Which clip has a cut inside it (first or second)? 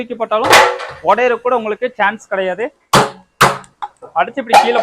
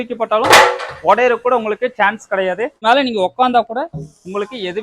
second